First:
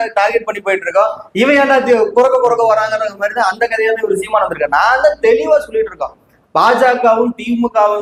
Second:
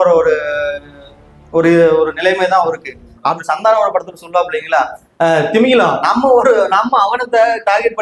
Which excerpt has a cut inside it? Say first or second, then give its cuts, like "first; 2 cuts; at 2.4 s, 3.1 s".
second; 1 cut; at 3.4 s